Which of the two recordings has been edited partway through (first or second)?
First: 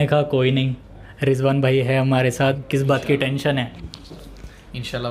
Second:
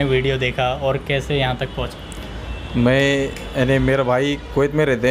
first